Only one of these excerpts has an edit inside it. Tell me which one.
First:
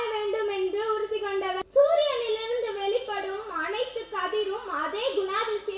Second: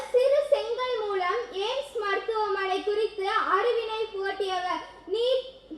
first; 1 cut; at 1.6 s

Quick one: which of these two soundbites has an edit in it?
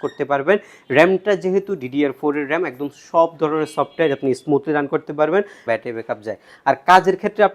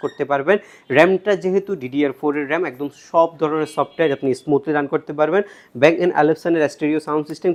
first; 1 cut; at 5.6 s

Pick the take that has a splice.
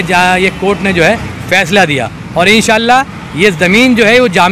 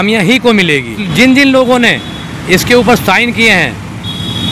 second; 1 cut; at 1.0 s

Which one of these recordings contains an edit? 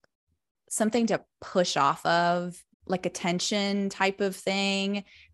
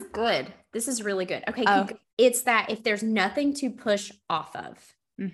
second; 1 cut; at 2.0 s

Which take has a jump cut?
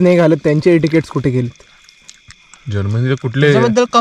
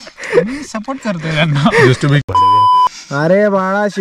second; 1 cut; at 2.3 s

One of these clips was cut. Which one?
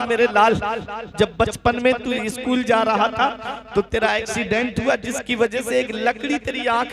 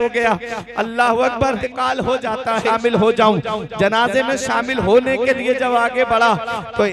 second; 2 cuts; at 1.6 s, 2.6 s

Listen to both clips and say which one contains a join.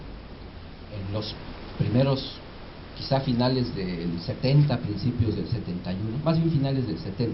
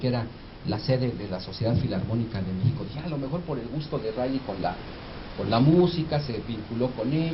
first; 1 cut; at 1.9 s

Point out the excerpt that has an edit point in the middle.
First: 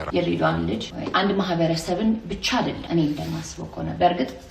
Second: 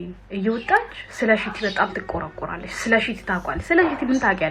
first; 2 cuts; at 0.9 s, 2.8 s

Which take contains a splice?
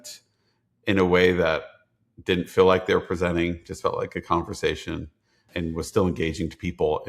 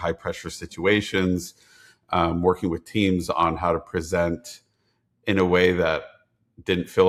first; 1 cut; at 5.4 s

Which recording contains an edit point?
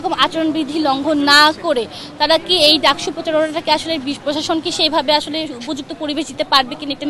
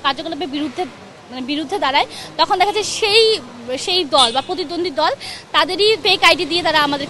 second; 1 cut; at 6.0 s

